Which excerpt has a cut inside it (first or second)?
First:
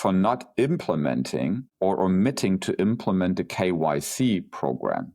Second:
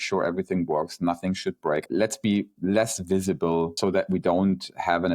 second